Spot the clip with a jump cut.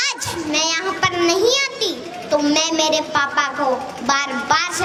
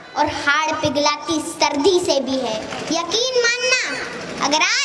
second; 1 cut; at 2.7 s

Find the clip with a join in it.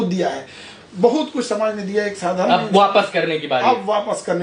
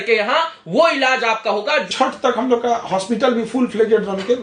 second; 1 cut; at 1.9 s

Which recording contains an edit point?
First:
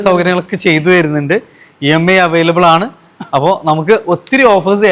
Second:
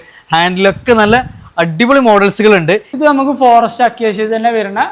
second; 1 cut; at 2.9 s

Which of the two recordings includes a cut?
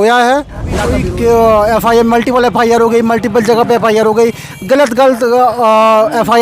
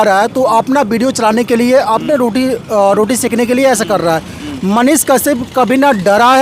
first; 1 cut; at 0.9 s

